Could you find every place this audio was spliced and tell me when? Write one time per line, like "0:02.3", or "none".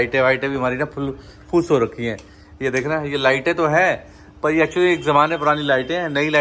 none